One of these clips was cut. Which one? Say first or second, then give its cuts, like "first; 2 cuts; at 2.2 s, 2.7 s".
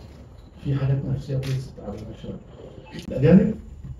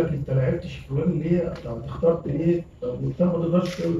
first; 1 cut; at 3.0 s